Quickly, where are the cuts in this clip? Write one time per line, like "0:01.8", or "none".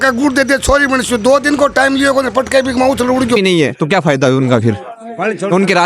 0:03.3